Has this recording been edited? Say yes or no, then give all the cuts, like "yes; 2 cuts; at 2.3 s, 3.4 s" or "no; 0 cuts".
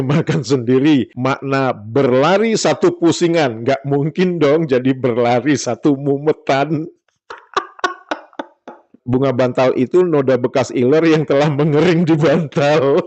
yes; 1 cut; at 9.0 s